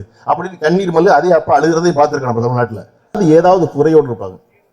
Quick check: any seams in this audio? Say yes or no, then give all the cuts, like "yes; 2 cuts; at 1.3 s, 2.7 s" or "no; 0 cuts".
yes; 1 cut; at 3.2 s